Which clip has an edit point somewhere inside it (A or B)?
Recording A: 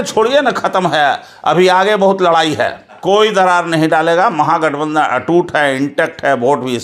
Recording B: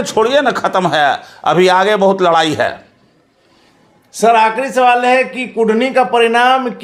A